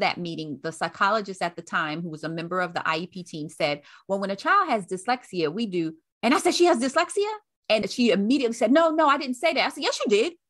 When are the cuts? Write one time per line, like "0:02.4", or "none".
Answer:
0:06.0
0:07.8